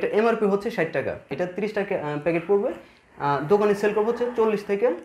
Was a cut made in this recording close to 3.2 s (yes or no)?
no